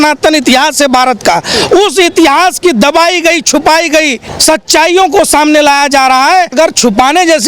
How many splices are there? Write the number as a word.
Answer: two